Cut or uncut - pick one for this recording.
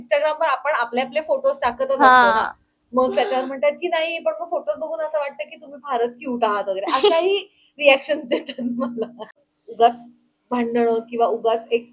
cut